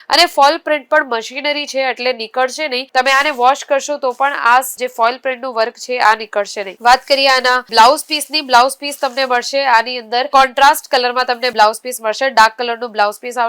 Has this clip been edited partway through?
no; 0 cuts

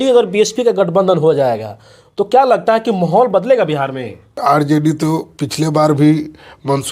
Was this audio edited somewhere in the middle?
yes; 1 cut; at 4.4 s

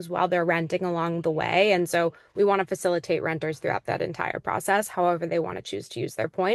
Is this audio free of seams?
yes; 0 cuts

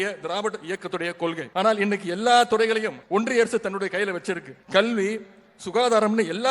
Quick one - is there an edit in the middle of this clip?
yes; 3 cuts; at 1.4 s, 3.0 s, 4.5 s

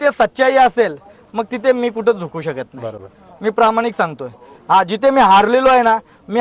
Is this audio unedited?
yes; 0 cuts

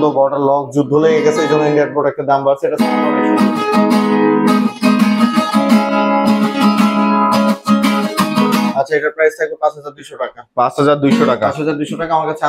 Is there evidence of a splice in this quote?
no; 0 cuts

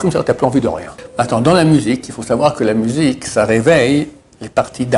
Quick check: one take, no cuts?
no; 1 cut; at 0.9 s

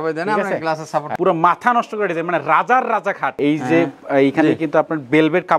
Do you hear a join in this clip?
yes; 2 cuts; at 1.1 s, 3.3 s

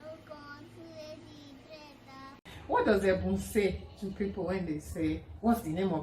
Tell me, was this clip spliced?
yes; 1 cut; at 2.7 s

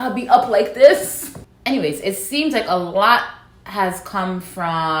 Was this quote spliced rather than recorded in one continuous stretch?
no; 0 cuts

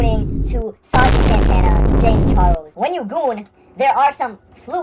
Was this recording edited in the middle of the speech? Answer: yes; 1 cut; at 2.7 s

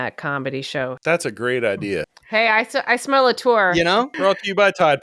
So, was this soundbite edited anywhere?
yes; 3 cuts; at 1.0 s, 2.2 s, 4.1 s

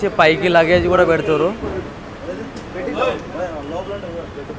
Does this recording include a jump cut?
no; 0 cuts

